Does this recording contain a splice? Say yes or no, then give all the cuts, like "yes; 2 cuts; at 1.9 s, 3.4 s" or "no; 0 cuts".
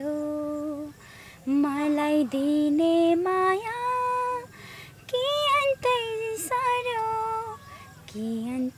no; 0 cuts